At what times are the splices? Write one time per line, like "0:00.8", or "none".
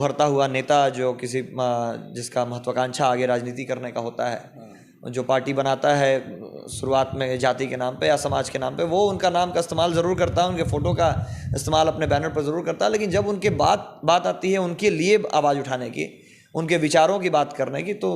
none